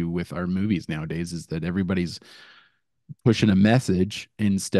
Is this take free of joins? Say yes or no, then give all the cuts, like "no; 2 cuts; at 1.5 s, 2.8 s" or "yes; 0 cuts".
yes; 0 cuts